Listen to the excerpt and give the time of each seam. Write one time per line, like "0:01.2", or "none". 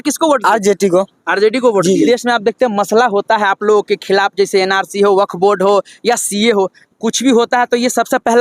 0:02.1